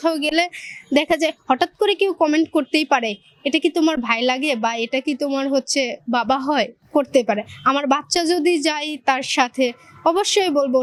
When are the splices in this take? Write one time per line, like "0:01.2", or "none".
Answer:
none